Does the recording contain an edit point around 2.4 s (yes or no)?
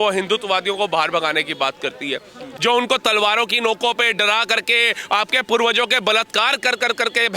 yes